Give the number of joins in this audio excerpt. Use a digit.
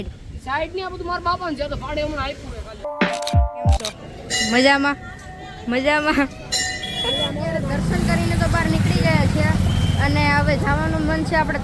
1